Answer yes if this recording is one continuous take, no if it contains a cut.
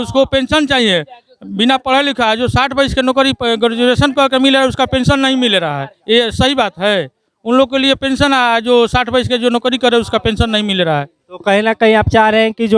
yes